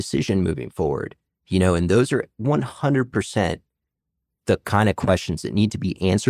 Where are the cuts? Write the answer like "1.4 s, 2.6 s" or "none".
none